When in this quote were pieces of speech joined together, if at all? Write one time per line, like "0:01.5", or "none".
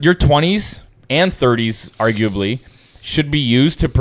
none

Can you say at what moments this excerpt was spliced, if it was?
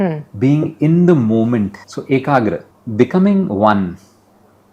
0:01.8
0:02.7

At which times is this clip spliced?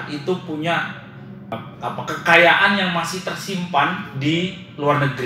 0:01.6

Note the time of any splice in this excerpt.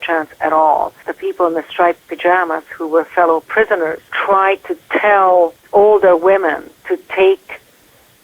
0:01.1
0:04.1
0:05.6

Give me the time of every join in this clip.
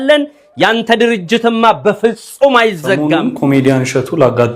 0:03.0

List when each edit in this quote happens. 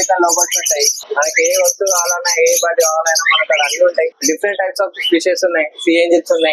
0:01.0
0:04.2

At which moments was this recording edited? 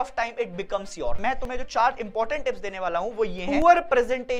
0:01.2
0:03.4

